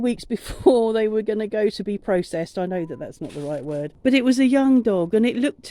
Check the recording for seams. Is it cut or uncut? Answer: cut